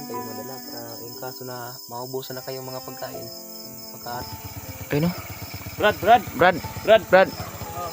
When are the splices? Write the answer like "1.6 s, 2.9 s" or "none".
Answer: 4.2 s